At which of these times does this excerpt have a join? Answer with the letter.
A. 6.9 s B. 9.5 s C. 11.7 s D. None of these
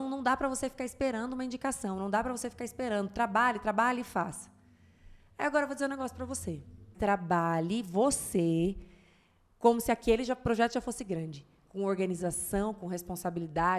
A